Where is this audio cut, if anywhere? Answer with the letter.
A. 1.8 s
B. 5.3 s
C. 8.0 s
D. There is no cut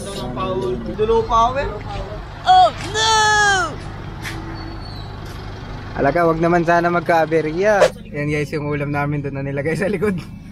C